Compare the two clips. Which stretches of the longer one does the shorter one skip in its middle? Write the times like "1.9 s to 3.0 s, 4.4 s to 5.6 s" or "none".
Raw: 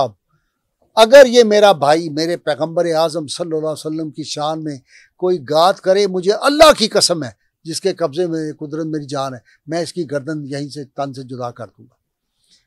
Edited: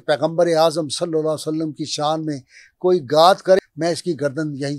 6.0 s to 9.5 s